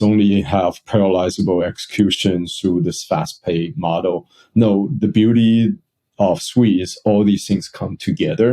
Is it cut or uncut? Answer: cut